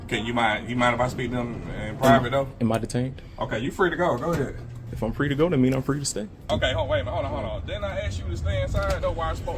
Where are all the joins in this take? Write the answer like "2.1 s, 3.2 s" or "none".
4.8 s, 6.5 s